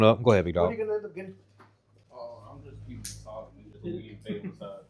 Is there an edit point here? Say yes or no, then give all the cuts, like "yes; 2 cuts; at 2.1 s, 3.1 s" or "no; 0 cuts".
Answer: no; 0 cuts